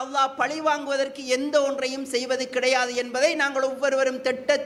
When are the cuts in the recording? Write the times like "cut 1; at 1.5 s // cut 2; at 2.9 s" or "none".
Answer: none